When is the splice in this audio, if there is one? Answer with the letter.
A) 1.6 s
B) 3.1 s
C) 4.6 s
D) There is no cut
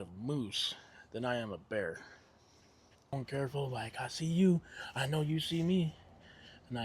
B